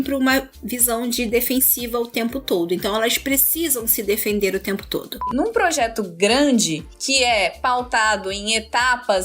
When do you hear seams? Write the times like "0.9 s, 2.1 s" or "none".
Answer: 5.2 s